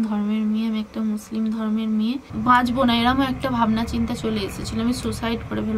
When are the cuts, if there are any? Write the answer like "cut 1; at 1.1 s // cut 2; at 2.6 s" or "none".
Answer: cut 1; at 2.3 s